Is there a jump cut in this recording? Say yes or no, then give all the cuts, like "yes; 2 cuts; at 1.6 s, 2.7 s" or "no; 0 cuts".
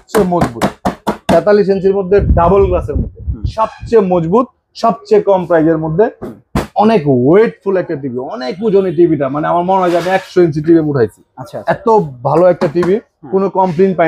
no; 0 cuts